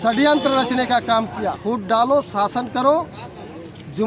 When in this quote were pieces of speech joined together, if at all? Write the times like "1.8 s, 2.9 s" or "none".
1.6 s